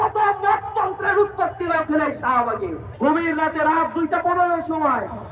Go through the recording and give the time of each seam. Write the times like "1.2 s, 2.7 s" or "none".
2.8 s